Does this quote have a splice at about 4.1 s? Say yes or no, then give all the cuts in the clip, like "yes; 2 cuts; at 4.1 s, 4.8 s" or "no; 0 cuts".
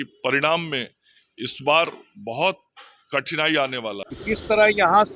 yes; 1 cut; at 4.1 s